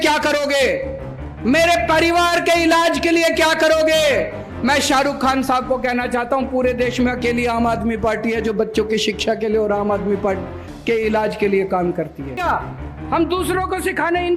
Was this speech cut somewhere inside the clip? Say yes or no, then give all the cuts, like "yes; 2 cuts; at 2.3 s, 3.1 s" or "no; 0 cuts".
yes; 1 cut; at 12.4 s